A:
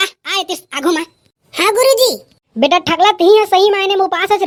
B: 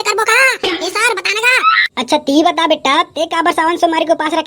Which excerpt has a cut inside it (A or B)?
B